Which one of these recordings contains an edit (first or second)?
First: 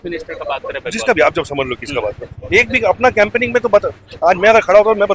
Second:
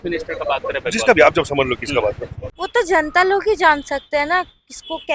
second